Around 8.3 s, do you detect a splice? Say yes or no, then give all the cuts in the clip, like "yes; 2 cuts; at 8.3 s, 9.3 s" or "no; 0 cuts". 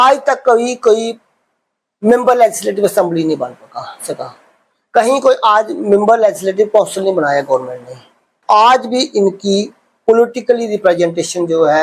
yes; 1 cut; at 8.3 s